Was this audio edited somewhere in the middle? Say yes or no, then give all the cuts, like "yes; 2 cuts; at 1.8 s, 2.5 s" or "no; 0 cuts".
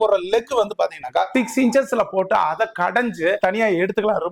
yes; 2 cuts; at 1.3 s, 3.4 s